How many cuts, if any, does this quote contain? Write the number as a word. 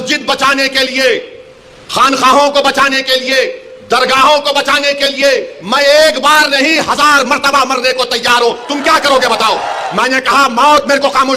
two